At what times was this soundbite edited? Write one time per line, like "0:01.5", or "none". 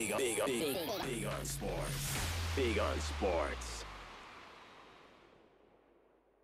none